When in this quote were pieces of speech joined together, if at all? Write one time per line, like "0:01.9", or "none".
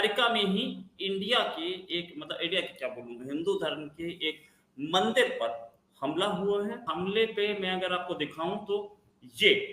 0:06.9